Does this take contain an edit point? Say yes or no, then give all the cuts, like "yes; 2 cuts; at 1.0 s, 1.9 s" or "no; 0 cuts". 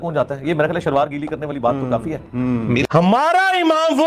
yes; 1 cut; at 2.9 s